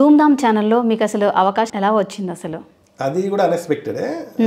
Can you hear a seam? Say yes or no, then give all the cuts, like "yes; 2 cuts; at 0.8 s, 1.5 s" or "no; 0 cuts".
yes; 1 cut; at 1.7 s